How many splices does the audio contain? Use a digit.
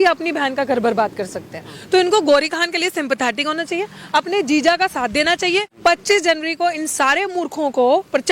1